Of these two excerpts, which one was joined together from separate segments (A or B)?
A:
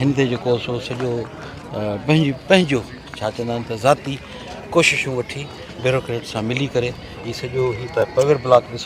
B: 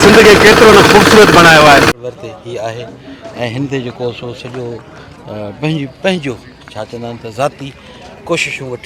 B